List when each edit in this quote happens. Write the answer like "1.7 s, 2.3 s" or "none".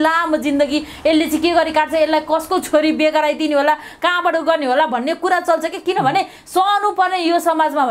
none